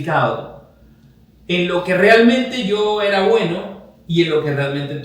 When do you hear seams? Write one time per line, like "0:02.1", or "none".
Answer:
none